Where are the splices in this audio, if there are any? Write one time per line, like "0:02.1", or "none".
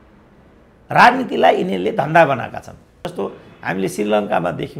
0:03.0